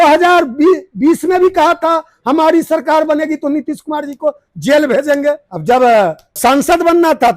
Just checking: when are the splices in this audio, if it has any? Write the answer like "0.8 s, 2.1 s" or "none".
5.5 s, 6.4 s